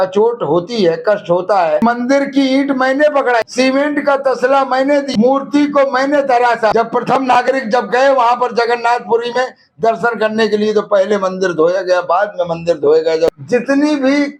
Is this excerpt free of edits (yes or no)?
no